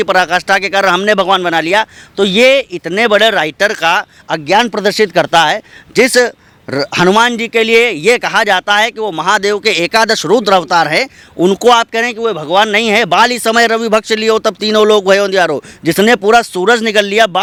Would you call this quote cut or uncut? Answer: uncut